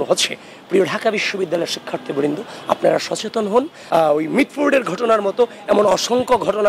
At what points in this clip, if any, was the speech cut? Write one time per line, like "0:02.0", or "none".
0:03.8